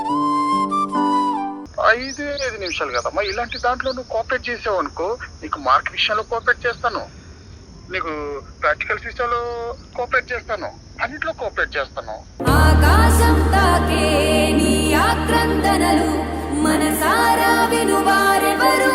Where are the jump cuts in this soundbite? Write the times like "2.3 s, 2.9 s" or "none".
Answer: 1.6 s